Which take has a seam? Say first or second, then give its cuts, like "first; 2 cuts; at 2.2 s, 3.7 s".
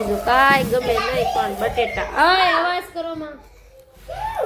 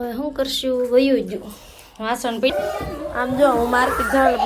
second; 1 cut; at 2.5 s